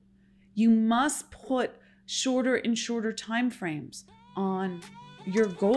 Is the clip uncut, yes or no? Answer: yes